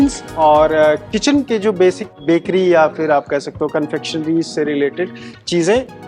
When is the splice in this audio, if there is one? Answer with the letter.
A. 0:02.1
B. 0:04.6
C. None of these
A